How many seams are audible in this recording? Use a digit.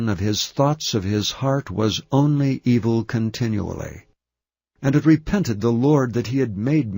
1